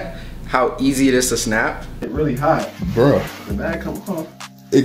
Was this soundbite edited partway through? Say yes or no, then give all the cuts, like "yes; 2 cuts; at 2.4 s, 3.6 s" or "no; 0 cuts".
yes; 1 cut; at 2.1 s